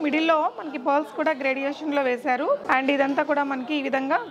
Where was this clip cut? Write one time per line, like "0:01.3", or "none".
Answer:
0:02.6

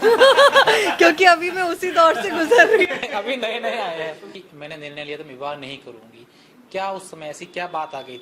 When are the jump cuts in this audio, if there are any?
0:04.3

